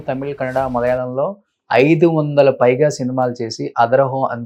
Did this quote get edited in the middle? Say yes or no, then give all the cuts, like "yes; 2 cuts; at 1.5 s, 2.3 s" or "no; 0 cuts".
no; 0 cuts